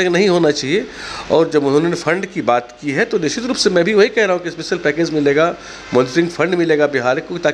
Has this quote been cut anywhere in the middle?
no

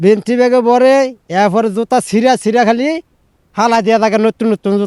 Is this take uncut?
yes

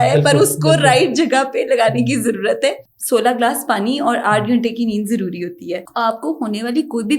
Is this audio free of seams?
no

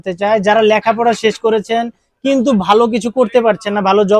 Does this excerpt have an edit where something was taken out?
no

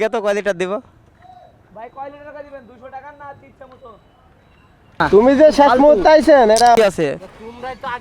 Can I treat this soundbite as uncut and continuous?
no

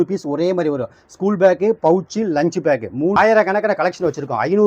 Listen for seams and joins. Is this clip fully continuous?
no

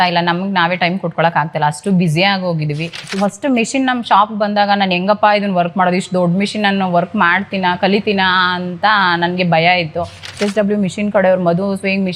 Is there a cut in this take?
yes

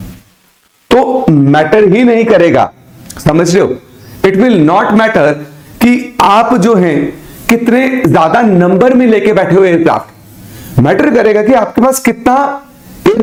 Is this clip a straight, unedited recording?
yes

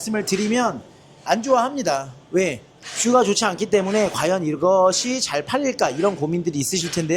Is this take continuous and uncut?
yes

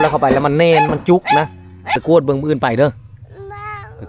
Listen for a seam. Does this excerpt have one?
yes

